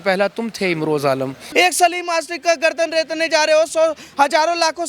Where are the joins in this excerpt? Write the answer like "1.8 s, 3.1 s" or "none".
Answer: 1.4 s